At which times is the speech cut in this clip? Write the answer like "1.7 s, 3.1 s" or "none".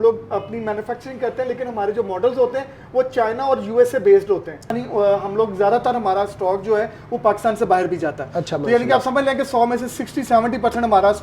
4.7 s